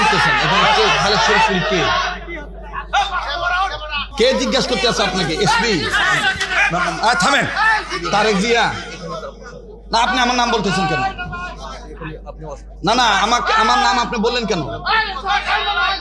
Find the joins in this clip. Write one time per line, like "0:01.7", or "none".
0:04.1